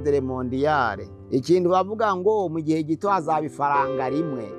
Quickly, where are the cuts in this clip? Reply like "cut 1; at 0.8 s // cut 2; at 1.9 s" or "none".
cut 1; at 1.1 s